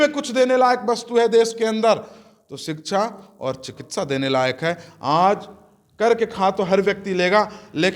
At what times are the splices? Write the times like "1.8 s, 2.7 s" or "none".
none

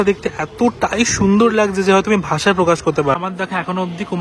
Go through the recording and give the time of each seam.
3.1 s

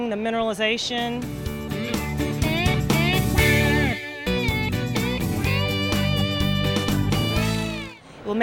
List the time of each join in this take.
none

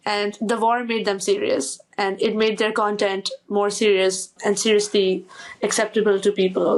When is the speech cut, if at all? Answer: none

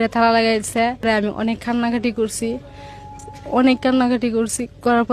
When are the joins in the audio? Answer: 1.1 s

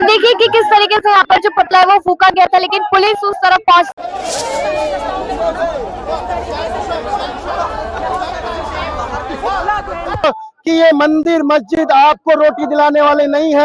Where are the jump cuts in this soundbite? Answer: 3.9 s, 10.2 s

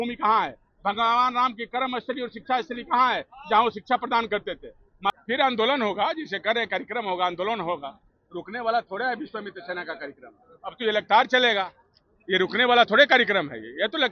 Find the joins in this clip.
5.1 s

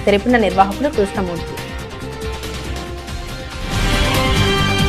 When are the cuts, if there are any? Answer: 1.5 s

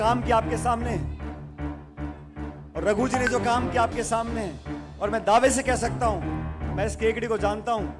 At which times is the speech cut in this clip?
1.0 s, 2.5 s

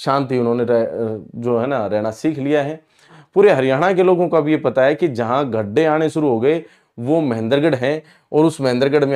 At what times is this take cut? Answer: 3.1 s

